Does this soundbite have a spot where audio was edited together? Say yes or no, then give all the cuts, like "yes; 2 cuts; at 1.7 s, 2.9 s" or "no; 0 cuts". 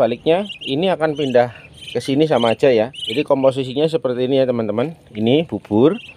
yes; 1 cut; at 3.1 s